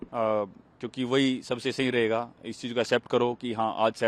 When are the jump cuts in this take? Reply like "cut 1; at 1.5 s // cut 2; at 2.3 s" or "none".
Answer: none